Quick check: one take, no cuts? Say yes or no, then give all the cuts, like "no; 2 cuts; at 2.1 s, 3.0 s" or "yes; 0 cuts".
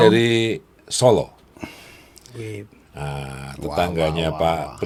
yes; 0 cuts